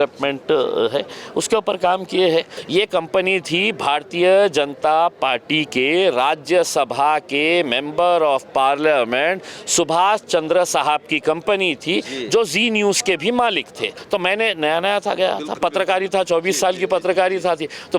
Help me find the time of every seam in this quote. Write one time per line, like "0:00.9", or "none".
0:02.6
0:14.0

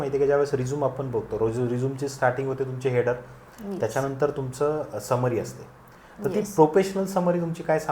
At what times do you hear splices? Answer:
none

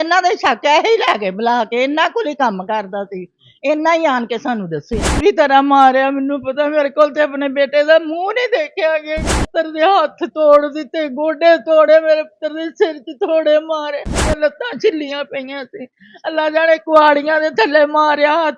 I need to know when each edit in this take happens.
0:05.1
0:09.4
0:14.2

